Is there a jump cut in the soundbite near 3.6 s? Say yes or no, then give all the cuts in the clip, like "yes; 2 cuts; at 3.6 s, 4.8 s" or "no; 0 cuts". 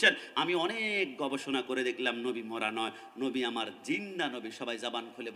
no; 0 cuts